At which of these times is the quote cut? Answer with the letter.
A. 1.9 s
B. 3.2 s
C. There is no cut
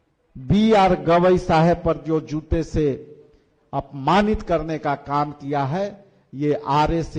C